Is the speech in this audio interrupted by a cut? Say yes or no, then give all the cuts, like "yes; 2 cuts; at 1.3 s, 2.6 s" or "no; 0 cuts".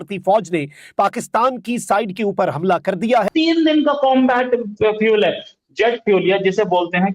yes; 1 cut; at 3.3 s